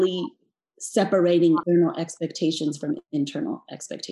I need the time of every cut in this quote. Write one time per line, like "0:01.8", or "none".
0:01.6